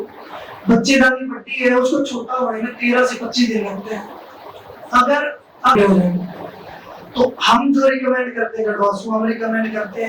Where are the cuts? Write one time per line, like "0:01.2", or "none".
0:05.8